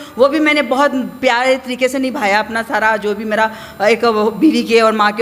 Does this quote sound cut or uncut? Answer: uncut